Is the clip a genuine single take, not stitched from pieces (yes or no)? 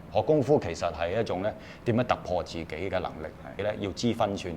no